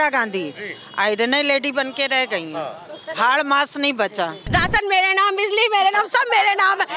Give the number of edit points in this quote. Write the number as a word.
one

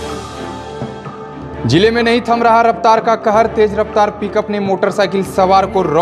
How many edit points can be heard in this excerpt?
one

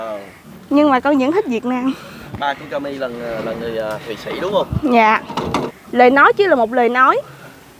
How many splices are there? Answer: one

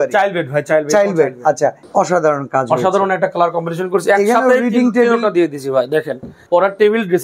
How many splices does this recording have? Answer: two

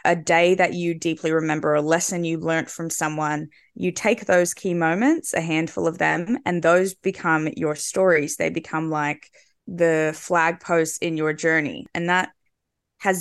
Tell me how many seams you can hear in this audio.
one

